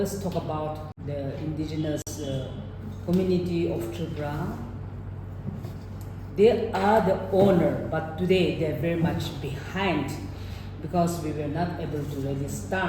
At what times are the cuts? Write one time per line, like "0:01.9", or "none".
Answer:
0:00.9